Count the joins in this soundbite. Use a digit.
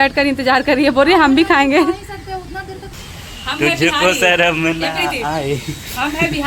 1